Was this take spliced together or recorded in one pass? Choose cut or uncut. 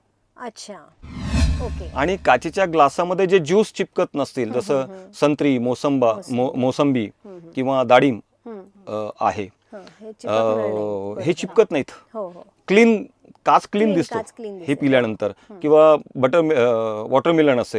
uncut